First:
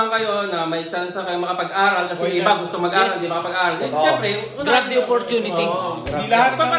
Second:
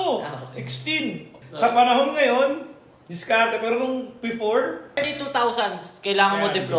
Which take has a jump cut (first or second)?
second